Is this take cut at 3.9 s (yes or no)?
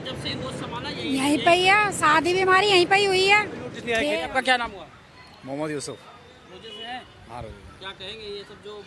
yes